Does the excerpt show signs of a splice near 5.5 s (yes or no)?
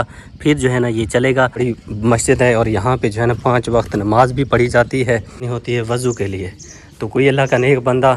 yes